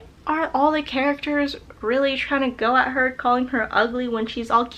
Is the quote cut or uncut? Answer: uncut